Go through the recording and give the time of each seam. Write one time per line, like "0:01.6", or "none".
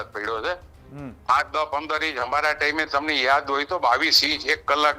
none